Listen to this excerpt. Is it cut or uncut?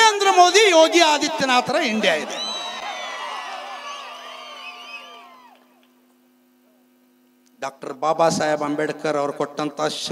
uncut